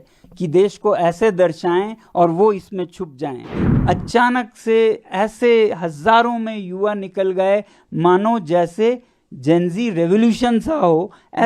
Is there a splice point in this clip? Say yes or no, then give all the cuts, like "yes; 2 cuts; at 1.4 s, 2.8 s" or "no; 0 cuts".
yes; 1 cut; at 3.6 s